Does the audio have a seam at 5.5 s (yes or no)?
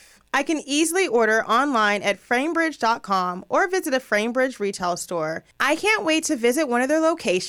yes